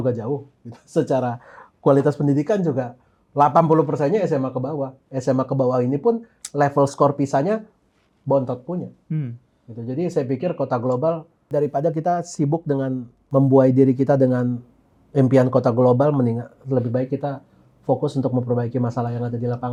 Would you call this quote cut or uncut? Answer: uncut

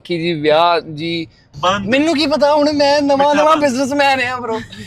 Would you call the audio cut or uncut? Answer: cut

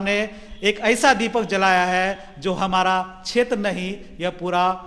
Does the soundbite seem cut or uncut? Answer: uncut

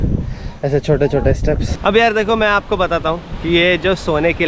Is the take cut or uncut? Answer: cut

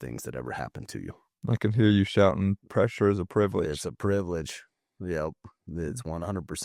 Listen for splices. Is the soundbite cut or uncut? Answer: uncut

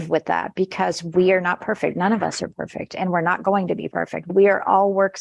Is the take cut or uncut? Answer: cut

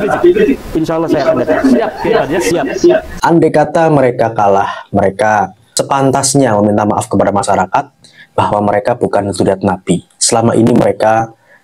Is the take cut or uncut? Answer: cut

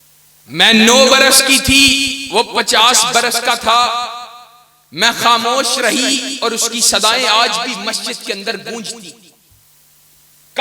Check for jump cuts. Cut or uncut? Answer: cut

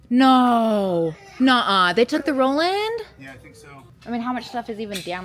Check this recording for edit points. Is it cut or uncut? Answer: cut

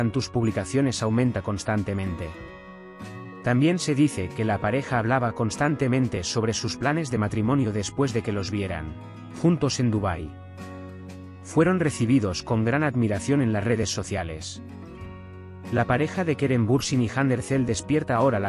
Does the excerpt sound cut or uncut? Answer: cut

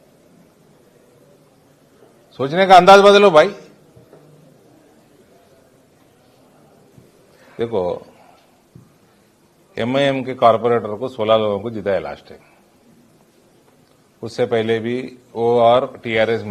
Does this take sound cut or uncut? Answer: cut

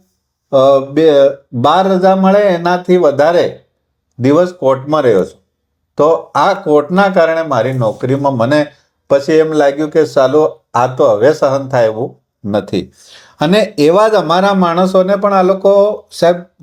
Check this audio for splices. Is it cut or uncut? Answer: uncut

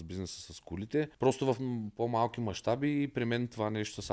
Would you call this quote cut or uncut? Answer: cut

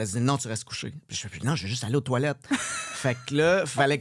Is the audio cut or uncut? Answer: uncut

